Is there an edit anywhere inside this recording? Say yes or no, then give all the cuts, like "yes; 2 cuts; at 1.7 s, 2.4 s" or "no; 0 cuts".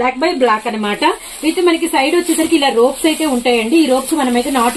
no; 0 cuts